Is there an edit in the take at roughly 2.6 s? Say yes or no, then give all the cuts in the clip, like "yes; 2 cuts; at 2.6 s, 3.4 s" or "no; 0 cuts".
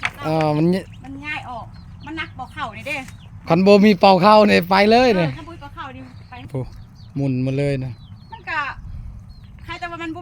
no; 1 cut; at 6.5 s